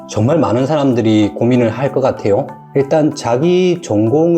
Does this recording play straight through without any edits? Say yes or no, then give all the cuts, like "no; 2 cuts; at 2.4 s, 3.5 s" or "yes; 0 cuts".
no; 1 cut; at 2.6 s